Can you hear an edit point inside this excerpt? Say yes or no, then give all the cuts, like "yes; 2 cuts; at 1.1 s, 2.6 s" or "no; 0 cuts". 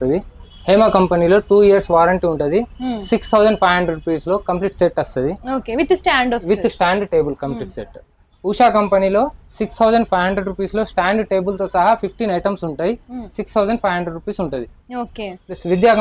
no; 0 cuts